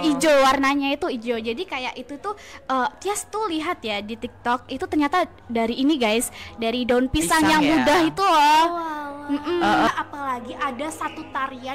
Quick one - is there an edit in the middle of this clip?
yes; 1 cut; at 9.9 s

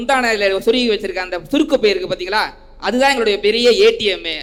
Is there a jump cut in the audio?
no; 0 cuts

